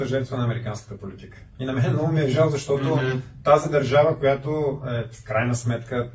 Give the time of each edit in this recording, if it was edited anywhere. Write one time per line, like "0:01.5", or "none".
none